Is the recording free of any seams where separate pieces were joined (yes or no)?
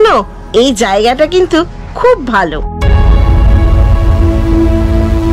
yes